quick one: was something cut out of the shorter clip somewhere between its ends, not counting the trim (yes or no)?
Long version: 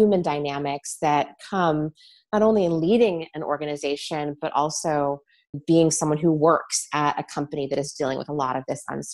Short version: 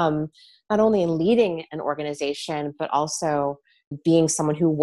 no